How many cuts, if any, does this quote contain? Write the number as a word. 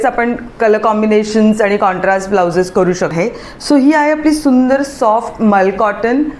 one